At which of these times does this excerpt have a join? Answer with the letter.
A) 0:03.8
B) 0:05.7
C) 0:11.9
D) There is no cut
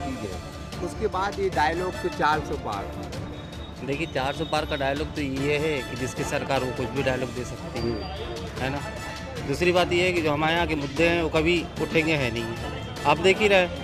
D